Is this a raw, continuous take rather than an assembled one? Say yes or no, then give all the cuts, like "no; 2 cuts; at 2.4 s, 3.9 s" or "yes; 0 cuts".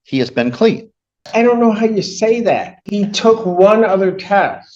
no; 2 cuts; at 1.3 s, 2.8 s